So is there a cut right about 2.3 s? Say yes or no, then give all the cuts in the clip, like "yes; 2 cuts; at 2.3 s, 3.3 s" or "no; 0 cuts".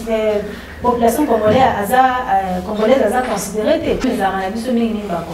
no; 1 cut; at 4.0 s